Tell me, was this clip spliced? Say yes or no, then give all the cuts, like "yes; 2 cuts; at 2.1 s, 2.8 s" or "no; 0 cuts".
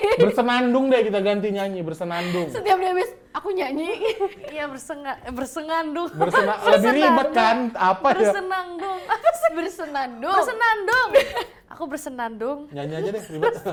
no; 0 cuts